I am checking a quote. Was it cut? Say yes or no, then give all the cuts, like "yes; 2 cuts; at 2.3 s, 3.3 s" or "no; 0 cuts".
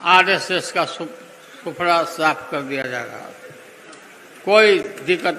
no; 0 cuts